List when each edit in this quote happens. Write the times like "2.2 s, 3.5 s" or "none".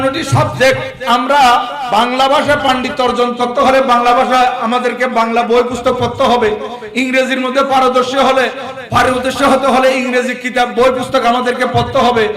0.9 s, 1.8 s